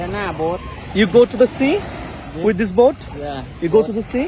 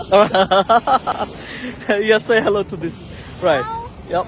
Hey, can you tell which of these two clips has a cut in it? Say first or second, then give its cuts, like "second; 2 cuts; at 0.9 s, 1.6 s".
second; 1 cut; at 1.1 s